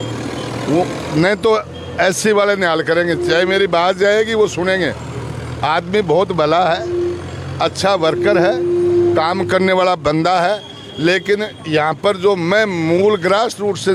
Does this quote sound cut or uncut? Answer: uncut